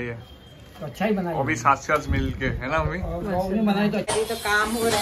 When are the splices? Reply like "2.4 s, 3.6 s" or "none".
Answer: 4.1 s